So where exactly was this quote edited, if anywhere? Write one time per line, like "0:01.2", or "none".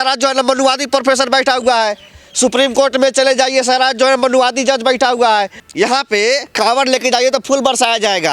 0:05.6